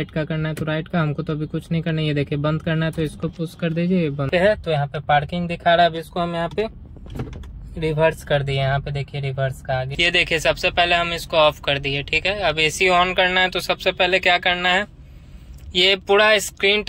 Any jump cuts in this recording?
yes; 2 cuts; at 4.3 s, 9.9 s

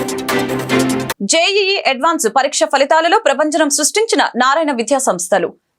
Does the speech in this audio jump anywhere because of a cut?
no; 0 cuts

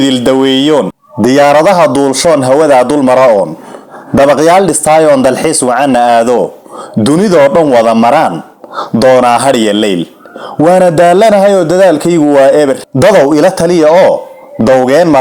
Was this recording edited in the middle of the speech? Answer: no; 0 cuts

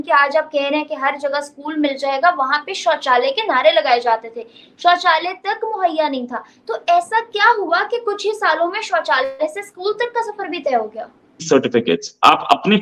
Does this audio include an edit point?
yes; 1 cut; at 11.4 s

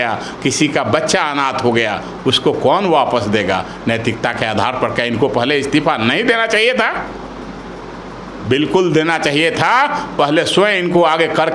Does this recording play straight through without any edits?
yes; 0 cuts

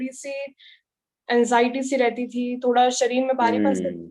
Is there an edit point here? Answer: no; 0 cuts

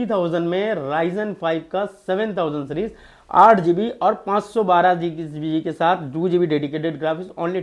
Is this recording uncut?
yes; 0 cuts

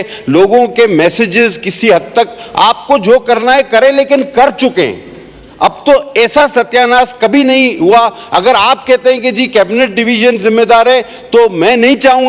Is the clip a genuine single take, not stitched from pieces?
yes; 0 cuts

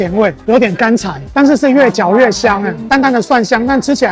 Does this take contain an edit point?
yes; 1 cut; at 2.8 s

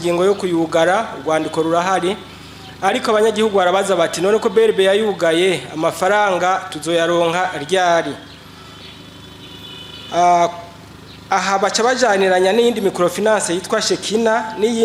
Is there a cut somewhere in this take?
no; 0 cuts

